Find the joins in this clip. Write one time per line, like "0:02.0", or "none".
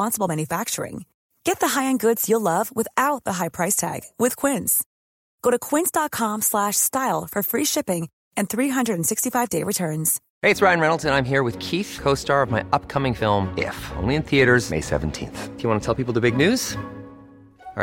0:10.2